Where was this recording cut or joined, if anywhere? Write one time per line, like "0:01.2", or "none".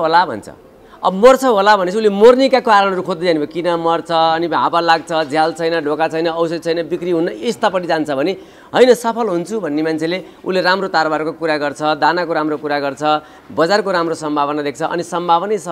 none